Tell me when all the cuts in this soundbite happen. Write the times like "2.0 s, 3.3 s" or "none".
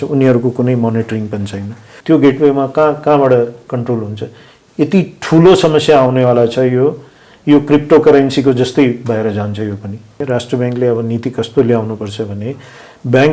1.9 s, 10.1 s